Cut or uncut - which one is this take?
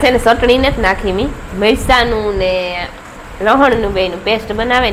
uncut